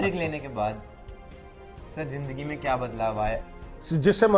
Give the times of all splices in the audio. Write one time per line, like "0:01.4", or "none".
0:03.4